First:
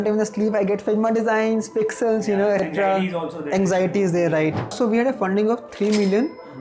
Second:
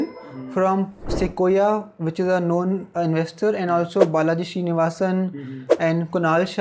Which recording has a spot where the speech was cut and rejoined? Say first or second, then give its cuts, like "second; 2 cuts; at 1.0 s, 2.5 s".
first; 2 cuts; at 2.6 s, 4.6 s